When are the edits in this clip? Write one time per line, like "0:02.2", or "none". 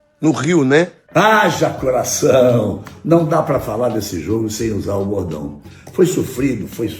0:01.0